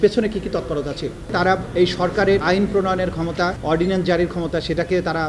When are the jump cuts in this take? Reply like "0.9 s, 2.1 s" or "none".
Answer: 1.6 s, 2.4 s